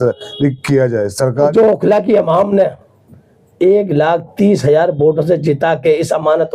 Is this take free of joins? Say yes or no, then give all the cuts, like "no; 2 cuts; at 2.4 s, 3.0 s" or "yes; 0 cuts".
no; 1 cut; at 1.5 s